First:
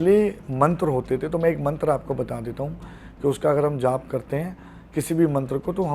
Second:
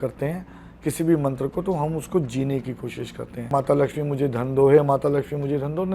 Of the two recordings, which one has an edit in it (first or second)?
second